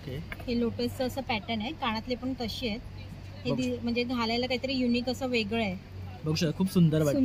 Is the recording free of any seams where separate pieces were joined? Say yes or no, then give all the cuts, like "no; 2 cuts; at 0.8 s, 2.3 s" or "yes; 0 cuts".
yes; 0 cuts